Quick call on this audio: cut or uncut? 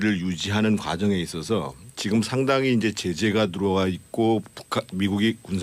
cut